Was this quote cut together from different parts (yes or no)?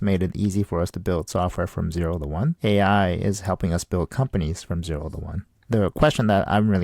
yes